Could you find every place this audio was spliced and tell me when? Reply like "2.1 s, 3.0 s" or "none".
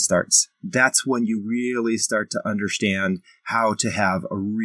none